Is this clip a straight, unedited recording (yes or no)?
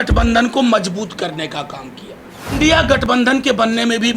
no